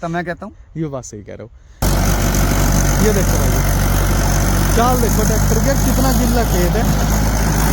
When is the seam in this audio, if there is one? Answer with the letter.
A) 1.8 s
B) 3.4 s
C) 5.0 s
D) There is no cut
A